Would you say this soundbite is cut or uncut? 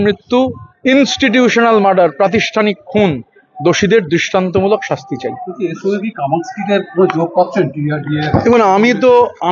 uncut